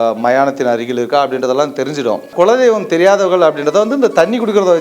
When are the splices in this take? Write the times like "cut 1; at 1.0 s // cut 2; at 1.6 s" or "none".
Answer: cut 1; at 2.3 s